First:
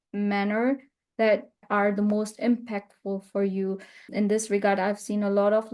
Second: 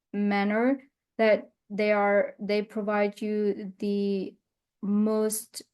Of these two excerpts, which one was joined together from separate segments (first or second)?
first